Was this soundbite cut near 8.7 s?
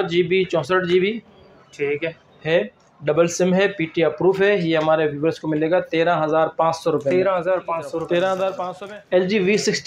yes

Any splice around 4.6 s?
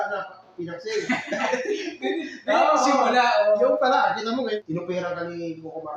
yes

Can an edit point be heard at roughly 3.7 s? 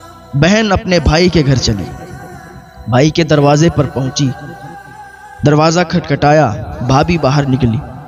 no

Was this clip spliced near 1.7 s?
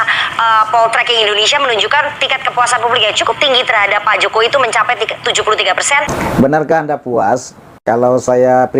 no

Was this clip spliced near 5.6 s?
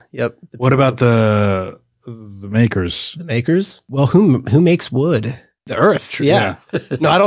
yes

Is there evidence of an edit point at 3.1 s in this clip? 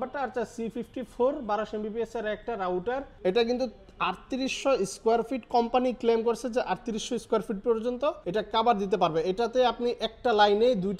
yes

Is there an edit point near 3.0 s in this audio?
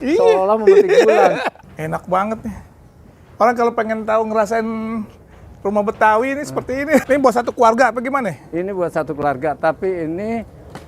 no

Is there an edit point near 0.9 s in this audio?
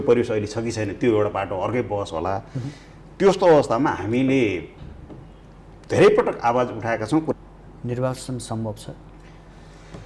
no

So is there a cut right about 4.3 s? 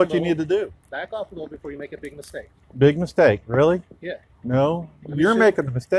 no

